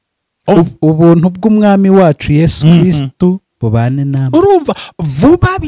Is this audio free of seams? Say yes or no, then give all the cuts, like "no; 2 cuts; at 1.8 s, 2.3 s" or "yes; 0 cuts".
yes; 0 cuts